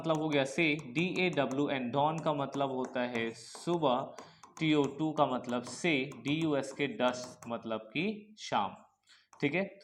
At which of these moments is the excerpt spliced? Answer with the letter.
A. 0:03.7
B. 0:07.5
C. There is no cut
C